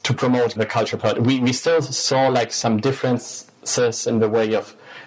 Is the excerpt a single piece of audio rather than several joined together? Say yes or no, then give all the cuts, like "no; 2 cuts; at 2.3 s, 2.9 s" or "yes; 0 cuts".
yes; 0 cuts